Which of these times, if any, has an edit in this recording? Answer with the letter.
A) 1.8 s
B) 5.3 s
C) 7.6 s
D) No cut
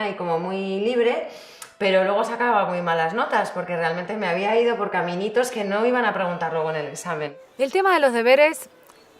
C